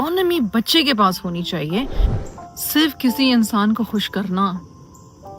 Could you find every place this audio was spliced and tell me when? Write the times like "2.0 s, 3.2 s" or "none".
2.1 s

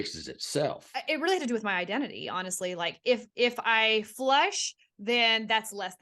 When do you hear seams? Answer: 0.9 s

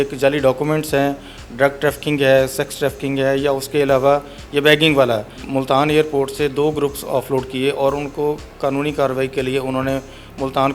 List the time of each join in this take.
5.4 s

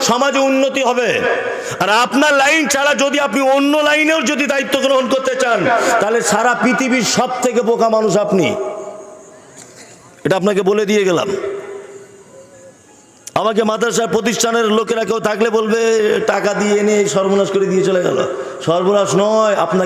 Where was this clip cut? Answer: none

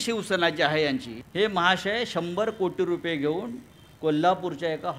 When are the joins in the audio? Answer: 1.2 s

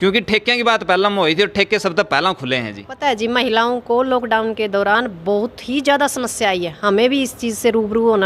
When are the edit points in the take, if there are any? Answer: 2.8 s

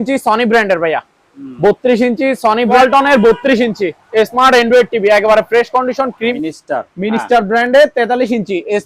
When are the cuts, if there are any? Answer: 2.7 s, 6.3 s

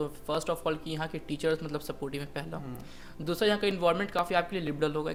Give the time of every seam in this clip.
none

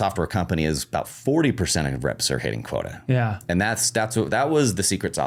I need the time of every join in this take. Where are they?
none

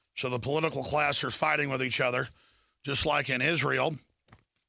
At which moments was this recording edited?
1.3 s

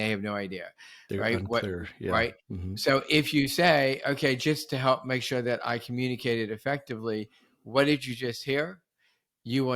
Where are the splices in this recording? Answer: none

